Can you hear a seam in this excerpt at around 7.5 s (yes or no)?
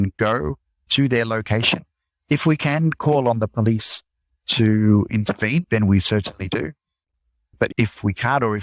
yes